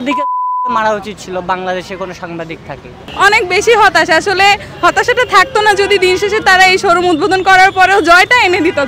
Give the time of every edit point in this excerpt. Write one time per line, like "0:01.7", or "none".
0:03.0